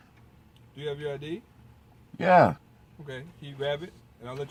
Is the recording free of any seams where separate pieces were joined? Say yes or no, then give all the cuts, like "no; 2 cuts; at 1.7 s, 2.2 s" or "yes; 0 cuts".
yes; 0 cuts